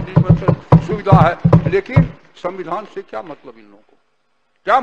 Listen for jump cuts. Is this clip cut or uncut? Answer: uncut